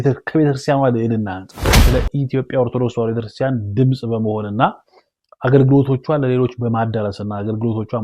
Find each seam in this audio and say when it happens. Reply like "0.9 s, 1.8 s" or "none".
1.8 s